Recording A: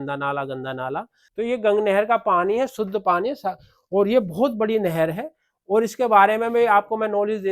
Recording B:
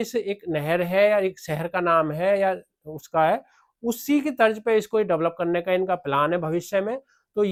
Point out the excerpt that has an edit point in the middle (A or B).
A